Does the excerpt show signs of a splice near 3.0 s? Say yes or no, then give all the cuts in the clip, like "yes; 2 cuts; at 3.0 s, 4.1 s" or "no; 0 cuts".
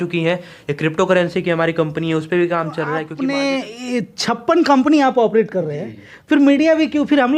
yes; 1 cut; at 3.0 s